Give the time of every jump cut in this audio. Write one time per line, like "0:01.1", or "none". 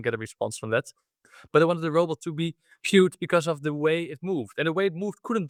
none